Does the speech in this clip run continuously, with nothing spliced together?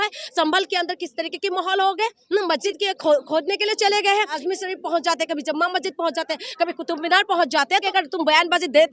no; 3 cuts; at 2.6 s, 4.4 s, 7.8 s

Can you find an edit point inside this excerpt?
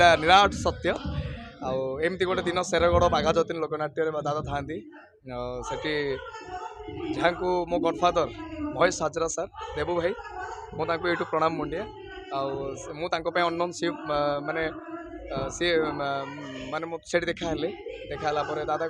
no; 0 cuts

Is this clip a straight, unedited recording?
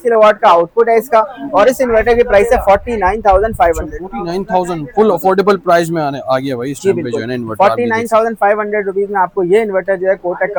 yes; 0 cuts

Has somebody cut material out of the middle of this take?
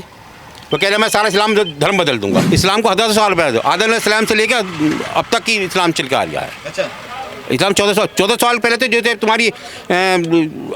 yes; 1 cut; at 2.5 s

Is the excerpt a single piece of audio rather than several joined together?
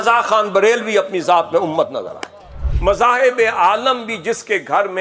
no; 1 cut; at 2.7 s

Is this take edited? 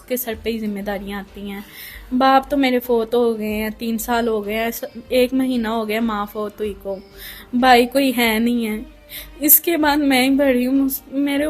no; 0 cuts

